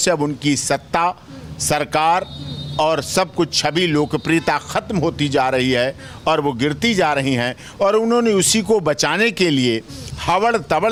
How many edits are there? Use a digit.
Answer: 0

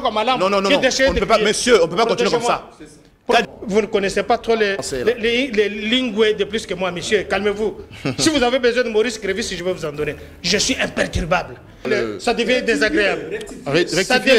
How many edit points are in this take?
2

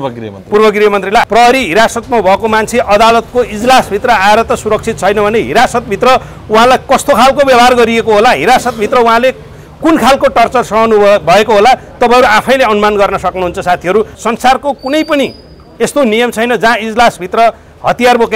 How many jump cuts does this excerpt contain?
2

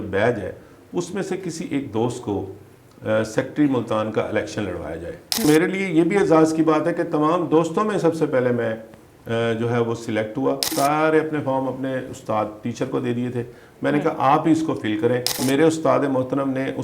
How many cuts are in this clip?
3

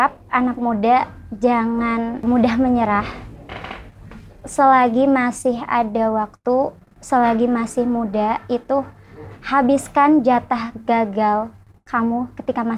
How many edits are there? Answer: 1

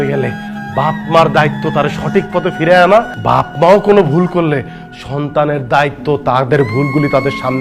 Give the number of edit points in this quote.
1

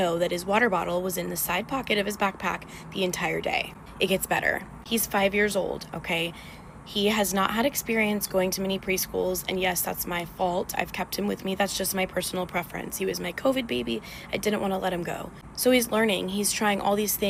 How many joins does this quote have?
0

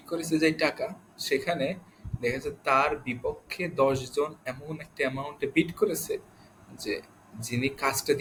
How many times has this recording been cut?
0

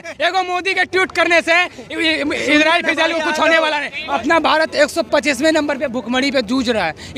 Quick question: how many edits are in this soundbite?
1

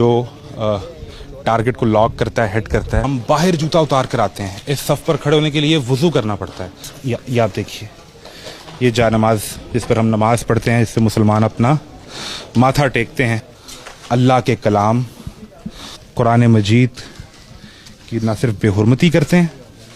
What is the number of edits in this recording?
3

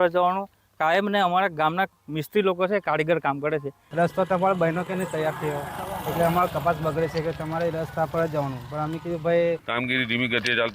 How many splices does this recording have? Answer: 2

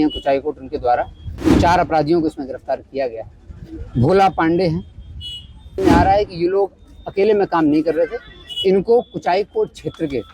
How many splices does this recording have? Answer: 1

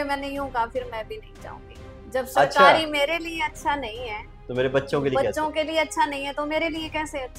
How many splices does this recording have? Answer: 0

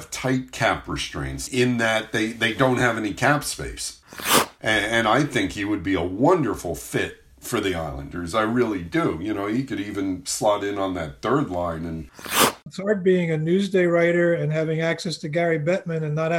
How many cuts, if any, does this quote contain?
3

